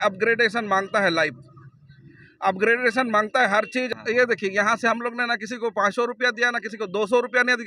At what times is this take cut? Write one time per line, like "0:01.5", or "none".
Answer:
0:03.9